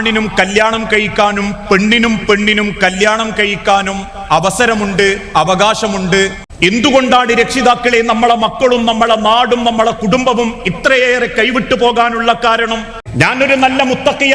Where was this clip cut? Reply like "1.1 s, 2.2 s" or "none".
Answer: 6.4 s, 13.0 s